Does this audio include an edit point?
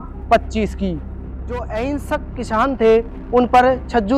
yes; 1 cut; at 1.1 s

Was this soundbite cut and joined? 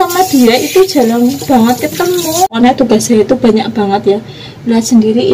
yes; 1 cut; at 2.5 s

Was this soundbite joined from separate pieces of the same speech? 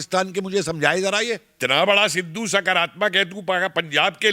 yes; 1 cut; at 1.5 s

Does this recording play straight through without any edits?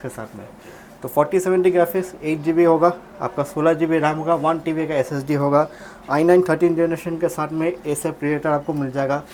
yes; 0 cuts

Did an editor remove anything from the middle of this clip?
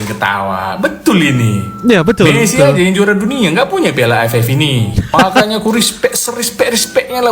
no; 0 cuts

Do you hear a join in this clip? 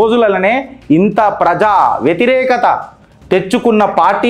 no; 0 cuts

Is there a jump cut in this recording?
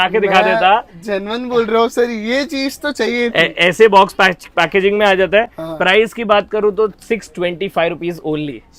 no; 0 cuts

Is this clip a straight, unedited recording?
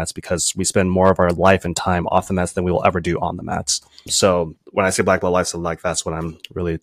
yes; 0 cuts

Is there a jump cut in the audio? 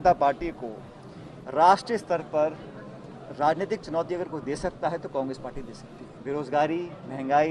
yes; 1 cut; at 6.1 s

